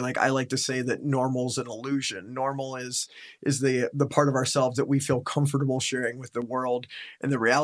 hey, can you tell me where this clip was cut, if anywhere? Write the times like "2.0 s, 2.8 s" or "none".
none